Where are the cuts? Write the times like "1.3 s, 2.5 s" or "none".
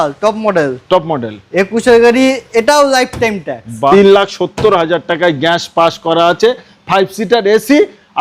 3.9 s